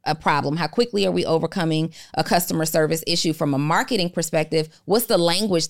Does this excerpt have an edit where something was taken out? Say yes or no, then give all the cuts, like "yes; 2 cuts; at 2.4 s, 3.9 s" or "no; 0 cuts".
no; 0 cuts